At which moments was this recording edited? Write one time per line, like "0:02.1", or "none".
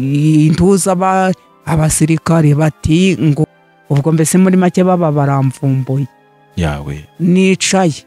none